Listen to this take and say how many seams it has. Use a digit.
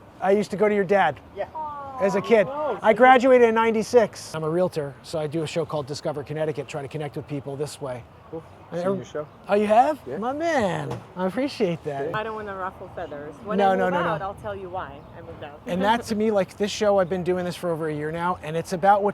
2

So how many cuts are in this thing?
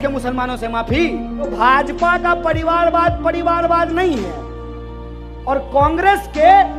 1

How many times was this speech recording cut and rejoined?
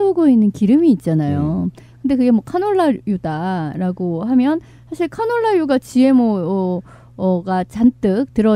0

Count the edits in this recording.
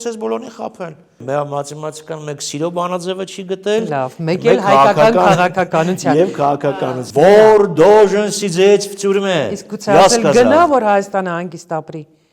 2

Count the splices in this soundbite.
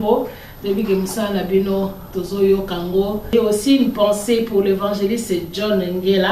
1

